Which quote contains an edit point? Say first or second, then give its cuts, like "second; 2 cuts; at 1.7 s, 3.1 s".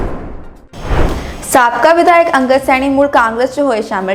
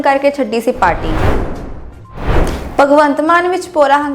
second; 2 cuts; at 1.0 s, 2.7 s